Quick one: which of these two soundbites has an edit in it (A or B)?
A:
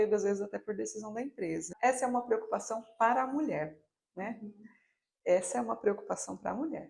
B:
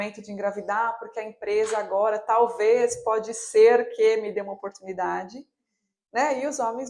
A